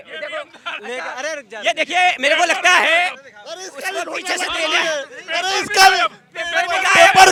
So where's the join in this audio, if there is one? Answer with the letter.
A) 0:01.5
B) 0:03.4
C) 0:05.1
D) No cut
D